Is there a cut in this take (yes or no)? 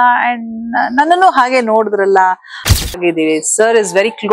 yes